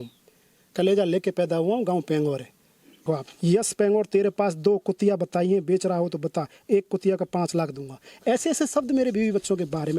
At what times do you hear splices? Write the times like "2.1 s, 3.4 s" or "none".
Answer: 3.0 s